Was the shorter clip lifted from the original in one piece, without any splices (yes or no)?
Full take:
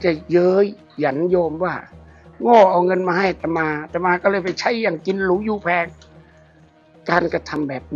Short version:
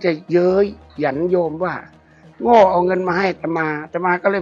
yes